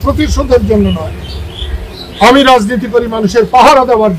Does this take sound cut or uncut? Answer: uncut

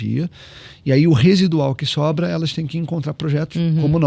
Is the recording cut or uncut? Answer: uncut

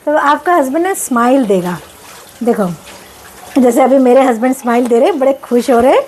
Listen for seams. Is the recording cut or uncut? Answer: uncut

